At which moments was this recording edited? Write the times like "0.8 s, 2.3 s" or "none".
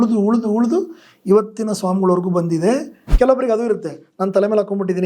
3.0 s